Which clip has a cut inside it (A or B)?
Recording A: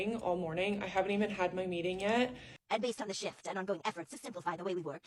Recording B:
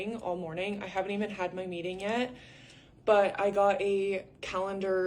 A